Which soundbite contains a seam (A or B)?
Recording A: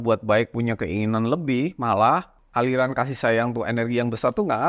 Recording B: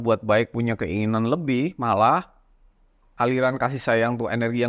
A